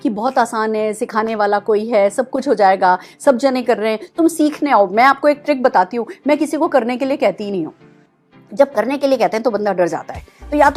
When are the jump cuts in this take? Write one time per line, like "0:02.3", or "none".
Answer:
none